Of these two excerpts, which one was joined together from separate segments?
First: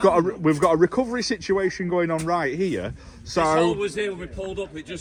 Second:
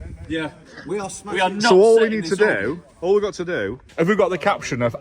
second; 1 cut; at 3.8 s

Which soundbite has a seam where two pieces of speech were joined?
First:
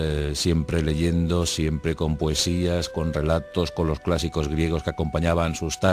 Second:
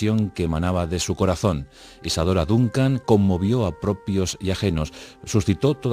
second; 1 cut; at 1.7 s

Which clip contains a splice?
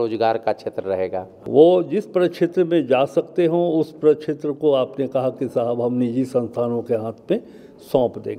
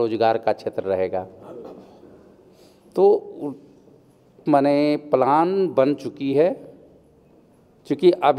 first; 1 cut; at 1.3 s

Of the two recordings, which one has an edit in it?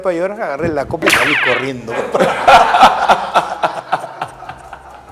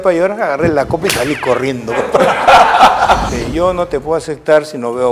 second; 1 cut; at 3.3 s

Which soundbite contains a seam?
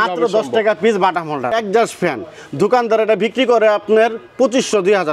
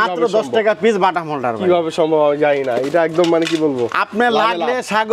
first; 1 cut; at 1.5 s

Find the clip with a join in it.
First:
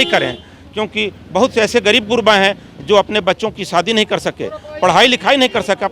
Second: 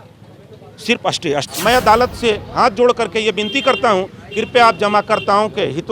second; 1 cut; at 1.4 s

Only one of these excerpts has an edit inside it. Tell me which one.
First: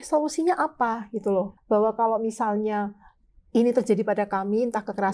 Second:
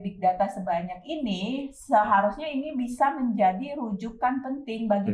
first; 1 cut; at 1.6 s

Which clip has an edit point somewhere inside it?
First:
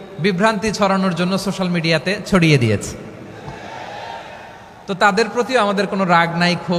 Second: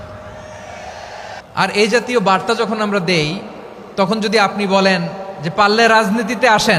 second; 1 cut; at 1.4 s

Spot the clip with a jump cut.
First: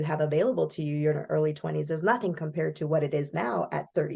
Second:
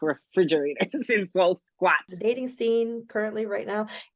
second; 1 cut; at 2.1 s

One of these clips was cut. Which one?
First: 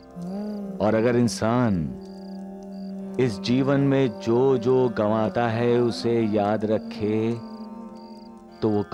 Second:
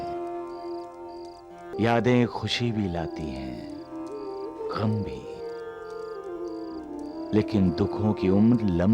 second; 1 cut; at 1.7 s

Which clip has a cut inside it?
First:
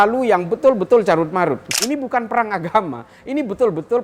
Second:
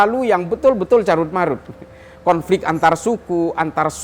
first; 1 cut; at 1.7 s

